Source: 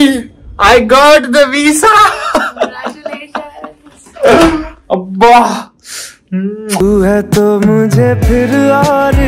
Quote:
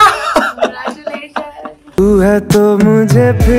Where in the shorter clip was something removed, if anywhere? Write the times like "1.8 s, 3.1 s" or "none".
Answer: 1.9 s